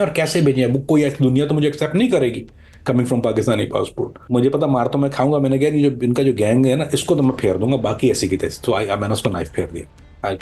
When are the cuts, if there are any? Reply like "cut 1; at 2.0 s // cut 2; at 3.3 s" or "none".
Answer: cut 1; at 4.2 s